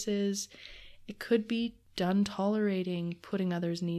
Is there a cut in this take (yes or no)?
yes